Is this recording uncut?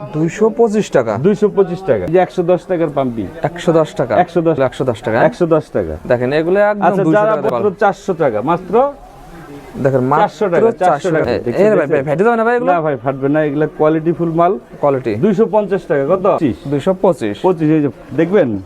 no; 5 cuts; at 2.0 s, 4.6 s, 7.5 s, 11.2 s, 16.4 s

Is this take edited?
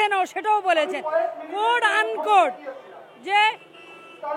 no; 0 cuts

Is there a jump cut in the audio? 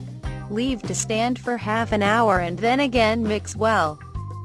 yes; 1 cut; at 2.9 s

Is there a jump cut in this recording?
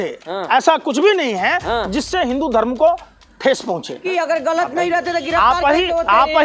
yes; 1 cut; at 4.0 s

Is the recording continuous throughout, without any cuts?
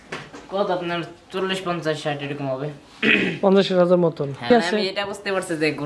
no; 1 cut; at 4.5 s

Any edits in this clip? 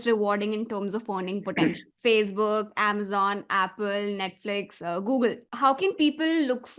yes; 2 cuts; at 1.9 s, 5.5 s

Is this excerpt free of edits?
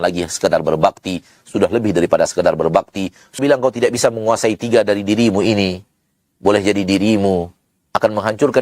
no; 1 cut; at 3.4 s

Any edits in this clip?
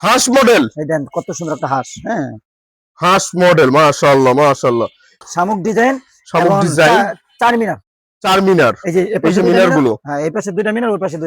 yes; 1 cut; at 5.2 s

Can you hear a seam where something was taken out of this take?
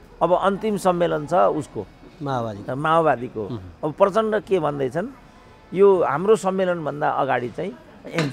no; 0 cuts

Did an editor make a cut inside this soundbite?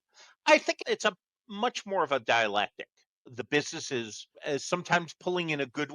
yes; 2 cuts; at 0.8 s, 4.4 s

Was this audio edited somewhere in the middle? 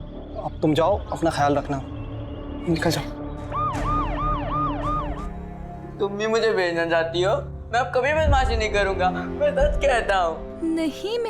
yes; 1 cut; at 5.1 s

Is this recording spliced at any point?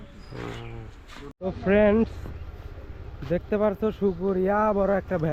yes; 1 cut; at 1.4 s

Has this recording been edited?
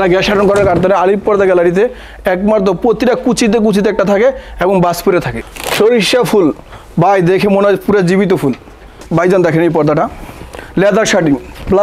yes; 2 cuts; at 5.4 s, 8.9 s

